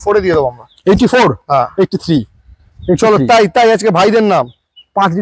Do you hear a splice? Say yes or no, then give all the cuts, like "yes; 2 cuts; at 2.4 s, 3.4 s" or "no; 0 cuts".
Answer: no; 0 cuts